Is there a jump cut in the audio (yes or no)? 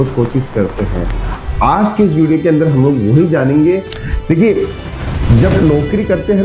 yes